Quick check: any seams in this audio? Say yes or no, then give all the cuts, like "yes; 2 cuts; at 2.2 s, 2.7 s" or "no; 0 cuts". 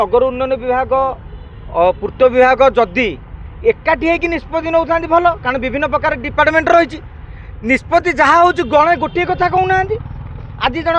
no; 0 cuts